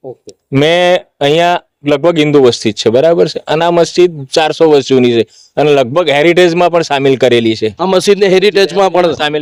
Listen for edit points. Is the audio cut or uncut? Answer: uncut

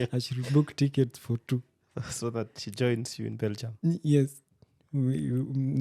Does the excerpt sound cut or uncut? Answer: uncut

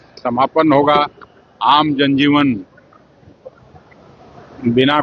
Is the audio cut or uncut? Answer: uncut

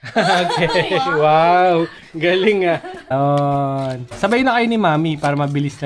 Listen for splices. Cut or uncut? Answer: cut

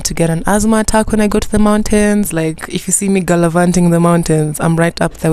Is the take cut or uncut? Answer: cut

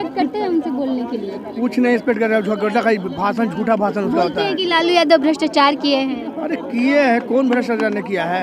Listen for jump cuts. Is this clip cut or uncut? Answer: uncut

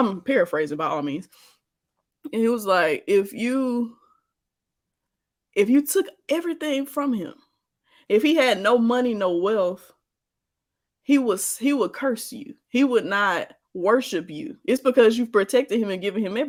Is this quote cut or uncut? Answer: uncut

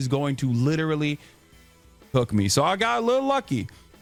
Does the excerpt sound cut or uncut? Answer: uncut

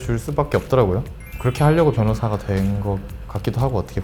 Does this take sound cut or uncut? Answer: uncut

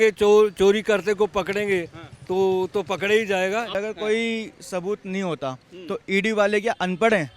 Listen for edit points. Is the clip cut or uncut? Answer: cut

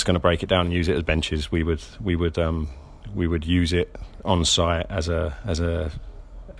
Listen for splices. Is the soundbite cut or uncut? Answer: uncut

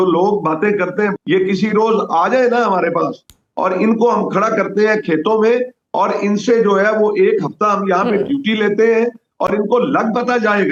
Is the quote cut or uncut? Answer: uncut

